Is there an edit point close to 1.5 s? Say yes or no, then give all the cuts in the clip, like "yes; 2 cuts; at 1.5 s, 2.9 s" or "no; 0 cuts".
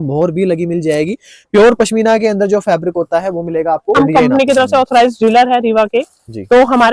no; 1 cut; at 4.0 s